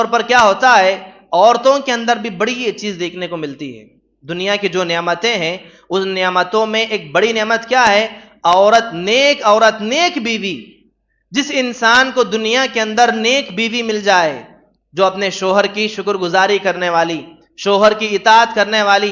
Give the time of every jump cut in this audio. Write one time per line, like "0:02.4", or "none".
none